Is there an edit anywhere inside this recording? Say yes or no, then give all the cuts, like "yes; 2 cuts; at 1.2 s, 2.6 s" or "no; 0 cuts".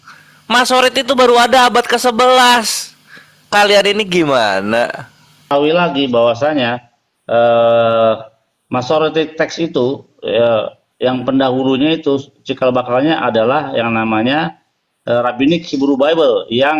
yes; 1 cut; at 5.5 s